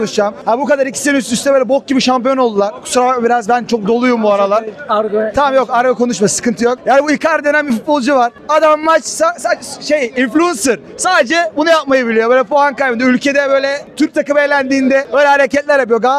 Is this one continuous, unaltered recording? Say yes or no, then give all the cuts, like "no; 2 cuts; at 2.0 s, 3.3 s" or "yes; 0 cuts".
yes; 0 cuts